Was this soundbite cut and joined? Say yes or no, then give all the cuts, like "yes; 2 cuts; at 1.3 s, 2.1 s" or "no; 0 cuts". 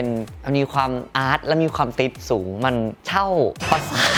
no; 0 cuts